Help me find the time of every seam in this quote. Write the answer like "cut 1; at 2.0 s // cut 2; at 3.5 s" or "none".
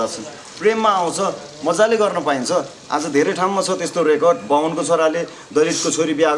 none